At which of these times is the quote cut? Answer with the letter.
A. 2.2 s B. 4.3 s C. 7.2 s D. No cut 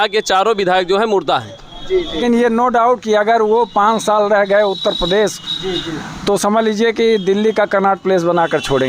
A